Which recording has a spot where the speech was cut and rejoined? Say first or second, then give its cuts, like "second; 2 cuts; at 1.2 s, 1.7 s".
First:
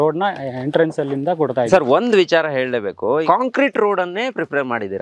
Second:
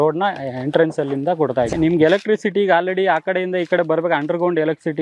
second; 1 cut; at 1.7 s